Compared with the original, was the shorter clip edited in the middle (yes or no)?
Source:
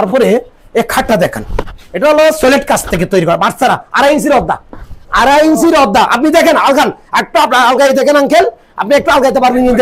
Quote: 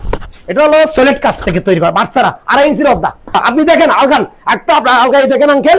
yes